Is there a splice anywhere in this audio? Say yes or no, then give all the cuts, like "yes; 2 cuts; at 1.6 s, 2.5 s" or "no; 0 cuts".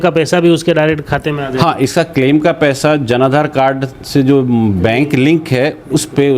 no; 0 cuts